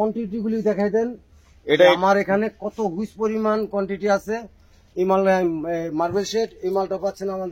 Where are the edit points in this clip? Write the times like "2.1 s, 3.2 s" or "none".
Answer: none